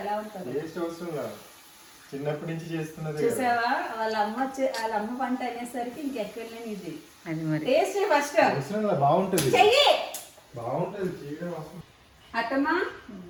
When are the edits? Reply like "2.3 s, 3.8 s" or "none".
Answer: none